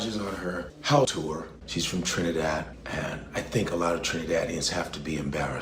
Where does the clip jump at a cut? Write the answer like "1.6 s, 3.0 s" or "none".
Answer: 1.3 s